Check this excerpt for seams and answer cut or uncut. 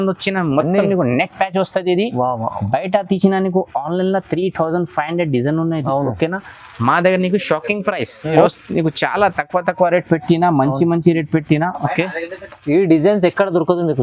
cut